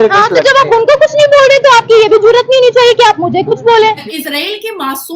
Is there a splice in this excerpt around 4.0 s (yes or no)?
yes